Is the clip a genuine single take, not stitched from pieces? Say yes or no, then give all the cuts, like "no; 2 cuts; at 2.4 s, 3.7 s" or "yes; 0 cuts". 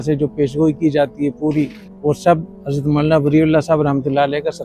no; 2 cuts; at 1.8 s, 2.6 s